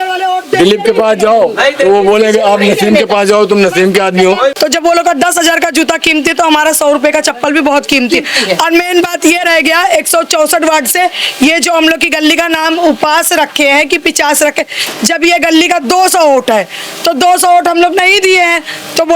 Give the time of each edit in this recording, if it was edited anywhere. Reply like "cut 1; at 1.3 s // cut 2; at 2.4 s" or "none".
cut 1; at 4.5 s